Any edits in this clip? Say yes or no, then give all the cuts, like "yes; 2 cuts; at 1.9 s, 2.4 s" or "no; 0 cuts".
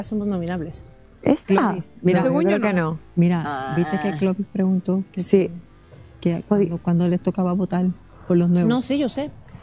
no; 0 cuts